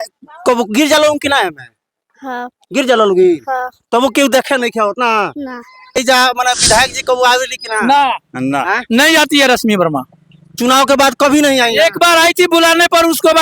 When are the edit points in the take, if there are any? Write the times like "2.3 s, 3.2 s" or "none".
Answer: 6.0 s